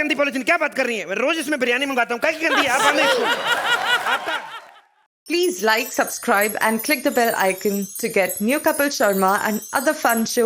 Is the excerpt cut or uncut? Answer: cut